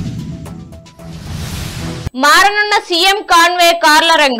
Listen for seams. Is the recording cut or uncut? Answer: cut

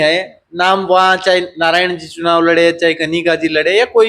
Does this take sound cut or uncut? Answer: uncut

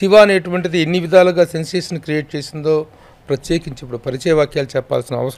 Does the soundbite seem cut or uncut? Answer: uncut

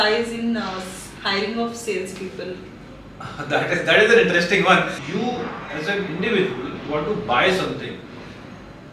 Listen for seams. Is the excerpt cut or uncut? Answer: cut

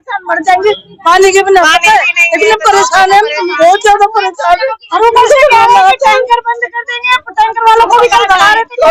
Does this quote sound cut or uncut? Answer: uncut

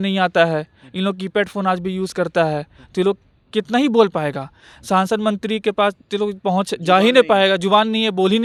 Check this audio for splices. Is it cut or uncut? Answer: uncut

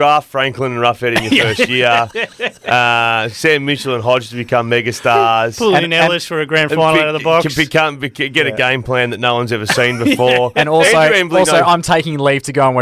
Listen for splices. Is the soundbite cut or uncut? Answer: uncut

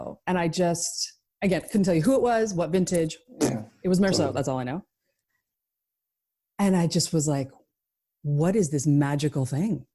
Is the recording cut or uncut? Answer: uncut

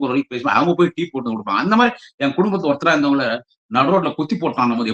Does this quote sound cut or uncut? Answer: uncut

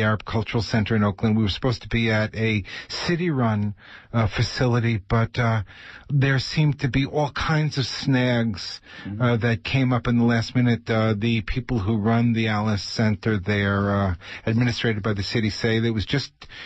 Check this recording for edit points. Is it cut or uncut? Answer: cut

